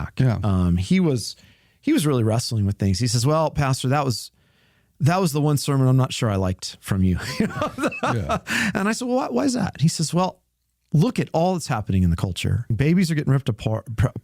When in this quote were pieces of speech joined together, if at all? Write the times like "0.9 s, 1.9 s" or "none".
12.7 s